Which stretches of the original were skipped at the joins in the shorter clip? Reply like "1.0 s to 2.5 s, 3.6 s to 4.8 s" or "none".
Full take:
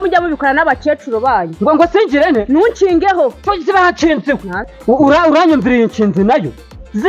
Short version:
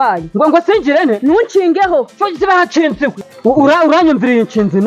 4.5 s to 4.7 s